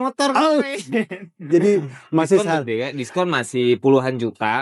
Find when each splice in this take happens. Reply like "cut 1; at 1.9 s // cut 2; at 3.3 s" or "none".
none